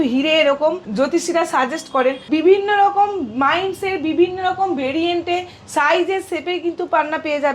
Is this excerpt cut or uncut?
cut